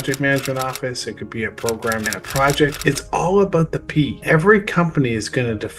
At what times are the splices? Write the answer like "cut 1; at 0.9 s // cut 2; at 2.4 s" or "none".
cut 1; at 2.2 s // cut 2; at 4.2 s